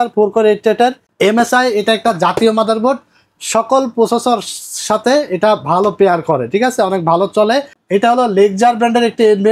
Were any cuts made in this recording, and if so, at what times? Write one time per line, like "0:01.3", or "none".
0:01.0
0:07.8